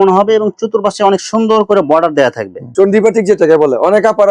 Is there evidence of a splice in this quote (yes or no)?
yes